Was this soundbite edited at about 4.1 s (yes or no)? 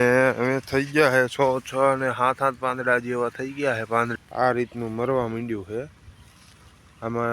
yes